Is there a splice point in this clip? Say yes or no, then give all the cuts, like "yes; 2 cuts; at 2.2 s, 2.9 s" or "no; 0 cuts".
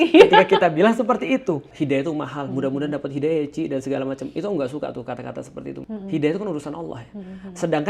yes; 2 cuts; at 1.7 s, 5.8 s